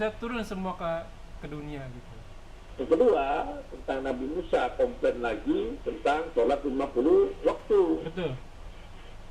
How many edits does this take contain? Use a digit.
1